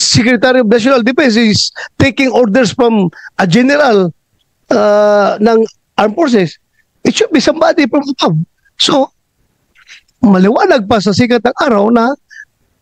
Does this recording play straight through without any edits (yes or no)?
yes